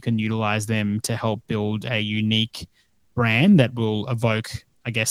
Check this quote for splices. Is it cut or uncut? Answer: uncut